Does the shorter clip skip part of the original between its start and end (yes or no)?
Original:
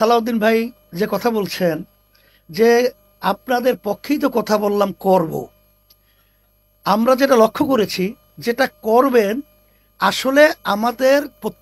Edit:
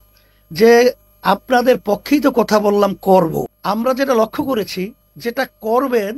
yes